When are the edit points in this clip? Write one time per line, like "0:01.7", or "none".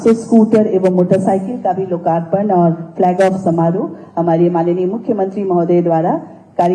none